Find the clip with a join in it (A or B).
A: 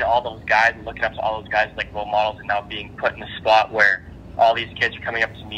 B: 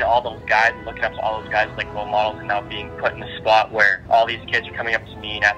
B